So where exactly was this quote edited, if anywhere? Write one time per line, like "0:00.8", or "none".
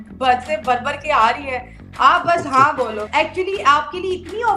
0:03.0